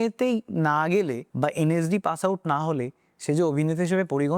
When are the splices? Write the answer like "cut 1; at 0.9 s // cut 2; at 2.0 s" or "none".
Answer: cut 1; at 1.2 s